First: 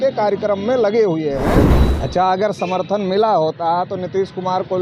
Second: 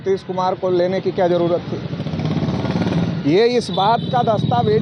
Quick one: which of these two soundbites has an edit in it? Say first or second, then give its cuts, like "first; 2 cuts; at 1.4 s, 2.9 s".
first; 1 cut; at 1.8 s